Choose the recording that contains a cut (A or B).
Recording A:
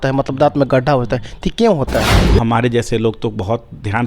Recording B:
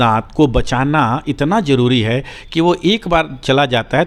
A